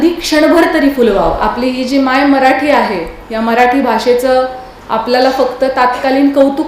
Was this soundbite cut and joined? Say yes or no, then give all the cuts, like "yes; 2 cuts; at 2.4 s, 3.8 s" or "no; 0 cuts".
yes; 1 cut; at 1.4 s